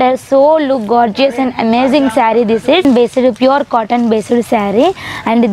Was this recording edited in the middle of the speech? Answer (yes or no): yes